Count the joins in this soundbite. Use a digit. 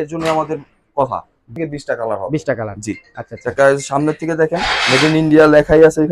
1